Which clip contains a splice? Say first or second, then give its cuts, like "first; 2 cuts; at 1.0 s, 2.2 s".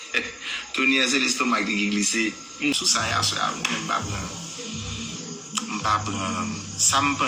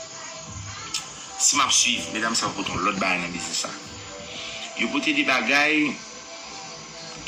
first; 1 cut; at 2.7 s